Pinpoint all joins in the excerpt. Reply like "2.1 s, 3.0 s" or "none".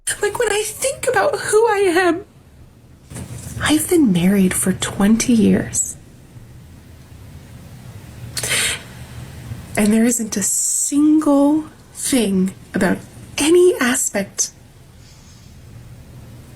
2.4 s

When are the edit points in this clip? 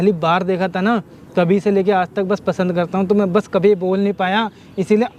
none

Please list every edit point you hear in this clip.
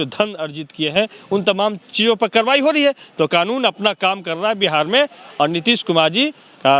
none

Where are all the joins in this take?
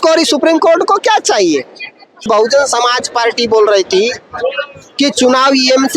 2.2 s

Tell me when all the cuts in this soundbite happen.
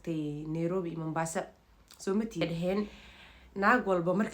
2.4 s

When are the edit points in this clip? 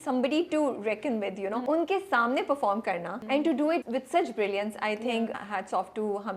1.6 s, 3.1 s, 3.9 s, 5.3 s

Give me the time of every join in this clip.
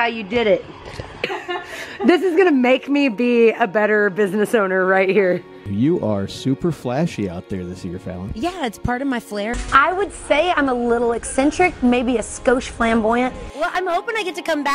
1.4 s, 5.6 s, 9.5 s, 13.4 s

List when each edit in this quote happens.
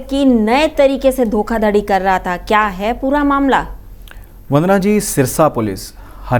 none

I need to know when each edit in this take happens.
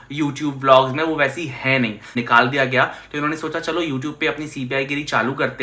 2.1 s

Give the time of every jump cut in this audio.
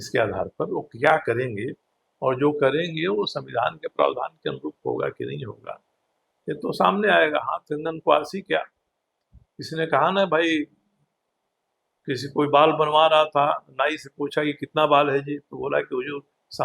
none

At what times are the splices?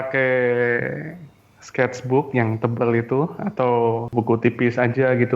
4.1 s

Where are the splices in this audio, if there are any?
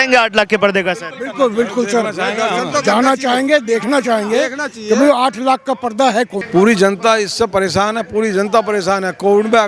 6.4 s

